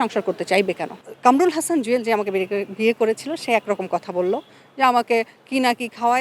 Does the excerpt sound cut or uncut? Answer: cut